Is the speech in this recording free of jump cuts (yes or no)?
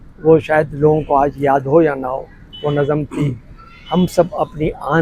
yes